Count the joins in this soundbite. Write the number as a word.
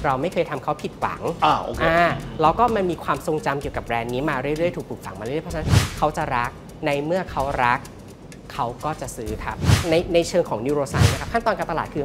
one